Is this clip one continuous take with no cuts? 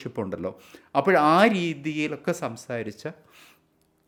yes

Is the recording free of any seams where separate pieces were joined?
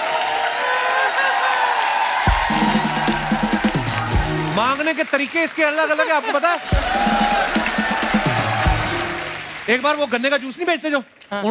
no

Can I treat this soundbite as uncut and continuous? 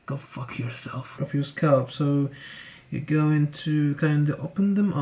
no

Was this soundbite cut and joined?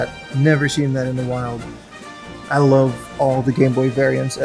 no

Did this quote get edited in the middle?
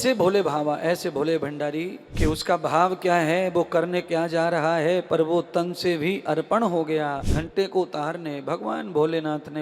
yes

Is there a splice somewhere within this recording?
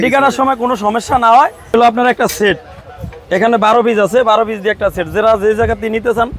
yes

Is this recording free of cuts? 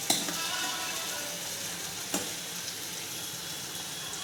yes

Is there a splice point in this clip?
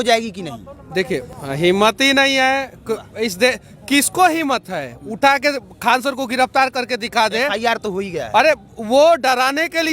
yes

